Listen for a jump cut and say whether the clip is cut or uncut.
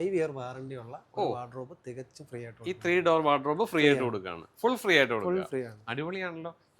uncut